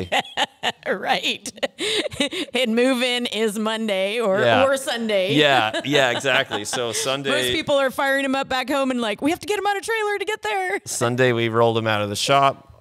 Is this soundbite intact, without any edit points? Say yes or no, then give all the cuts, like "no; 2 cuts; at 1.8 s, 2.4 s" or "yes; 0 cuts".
yes; 0 cuts